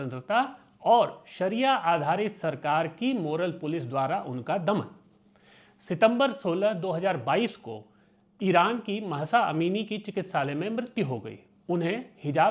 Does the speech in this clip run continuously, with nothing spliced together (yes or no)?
yes